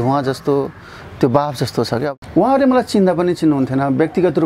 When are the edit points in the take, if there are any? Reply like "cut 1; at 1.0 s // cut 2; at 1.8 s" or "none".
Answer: cut 1; at 2.1 s